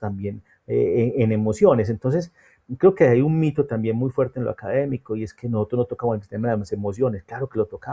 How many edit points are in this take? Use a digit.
0